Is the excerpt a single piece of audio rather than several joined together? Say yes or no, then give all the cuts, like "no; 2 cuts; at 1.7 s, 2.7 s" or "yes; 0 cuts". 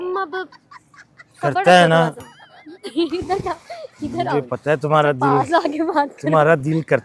yes; 0 cuts